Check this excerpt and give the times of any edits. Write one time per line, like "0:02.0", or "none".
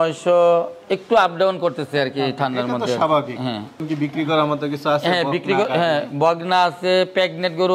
0:03.8